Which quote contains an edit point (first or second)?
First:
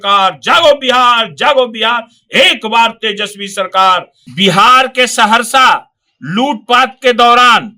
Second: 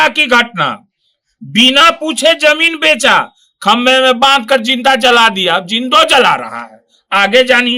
first